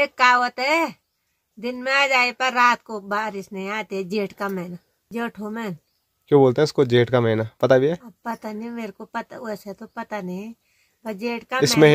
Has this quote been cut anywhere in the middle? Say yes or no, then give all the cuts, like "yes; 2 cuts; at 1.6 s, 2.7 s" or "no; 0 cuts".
no; 0 cuts